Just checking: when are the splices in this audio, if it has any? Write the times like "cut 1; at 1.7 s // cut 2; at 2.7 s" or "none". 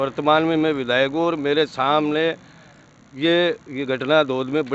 none